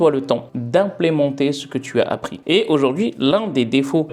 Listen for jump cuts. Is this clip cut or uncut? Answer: uncut